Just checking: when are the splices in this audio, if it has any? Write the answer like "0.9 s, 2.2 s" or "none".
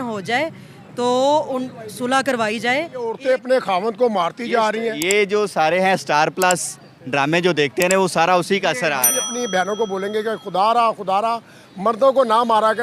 3.2 s, 9.2 s